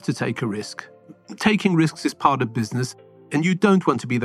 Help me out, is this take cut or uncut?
cut